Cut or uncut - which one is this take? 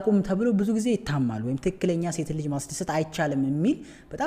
uncut